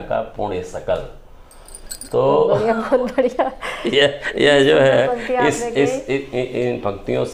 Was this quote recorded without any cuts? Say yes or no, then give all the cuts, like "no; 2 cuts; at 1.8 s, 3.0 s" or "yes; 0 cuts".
yes; 0 cuts